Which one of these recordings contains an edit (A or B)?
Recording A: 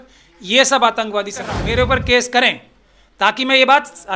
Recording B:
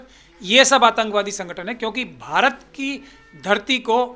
A